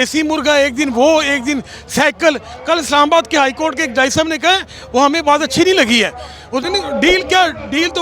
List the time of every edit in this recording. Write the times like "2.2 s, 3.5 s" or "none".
6.6 s